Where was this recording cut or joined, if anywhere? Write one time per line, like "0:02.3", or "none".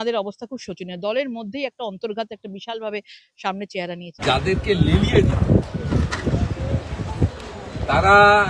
0:04.1